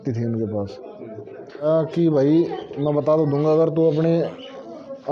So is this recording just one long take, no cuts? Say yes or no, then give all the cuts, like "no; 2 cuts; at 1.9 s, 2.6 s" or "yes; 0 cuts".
no; 1 cut; at 1.6 s